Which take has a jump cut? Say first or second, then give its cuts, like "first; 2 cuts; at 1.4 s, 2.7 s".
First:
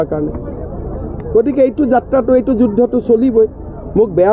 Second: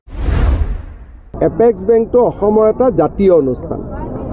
second; 1 cut; at 1.3 s